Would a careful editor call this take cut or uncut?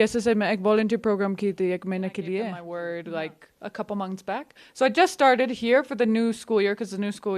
cut